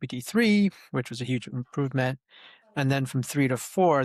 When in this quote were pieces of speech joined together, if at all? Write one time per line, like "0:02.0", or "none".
none